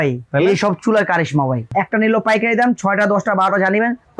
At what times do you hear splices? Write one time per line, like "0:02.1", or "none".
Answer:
0:01.8